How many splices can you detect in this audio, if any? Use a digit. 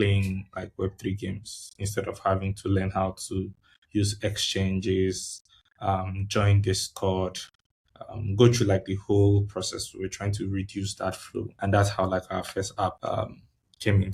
1